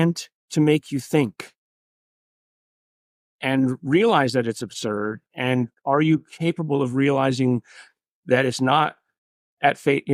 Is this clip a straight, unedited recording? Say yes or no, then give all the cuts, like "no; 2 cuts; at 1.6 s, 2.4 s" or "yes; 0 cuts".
yes; 0 cuts